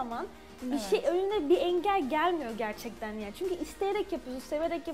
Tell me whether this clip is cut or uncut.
uncut